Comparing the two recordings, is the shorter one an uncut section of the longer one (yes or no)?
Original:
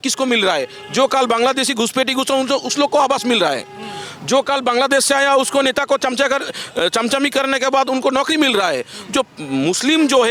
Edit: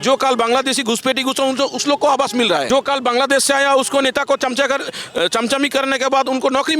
no